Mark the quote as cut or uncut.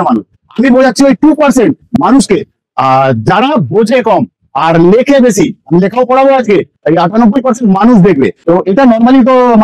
cut